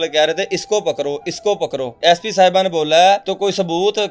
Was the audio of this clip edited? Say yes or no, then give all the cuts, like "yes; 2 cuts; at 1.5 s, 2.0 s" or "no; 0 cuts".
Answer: yes; 2 cuts; at 2.0 s, 3.3 s